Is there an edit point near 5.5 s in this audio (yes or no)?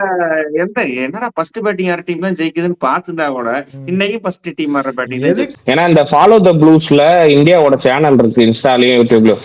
yes